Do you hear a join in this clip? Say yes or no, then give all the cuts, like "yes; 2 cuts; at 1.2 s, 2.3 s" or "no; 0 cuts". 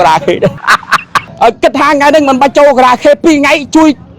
yes; 1 cut; at 1.2 s